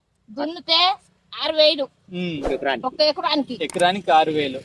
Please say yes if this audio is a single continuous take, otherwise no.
yes